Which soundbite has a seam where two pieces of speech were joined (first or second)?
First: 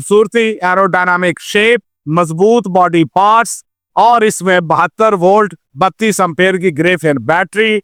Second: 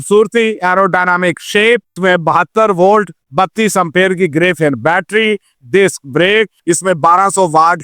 second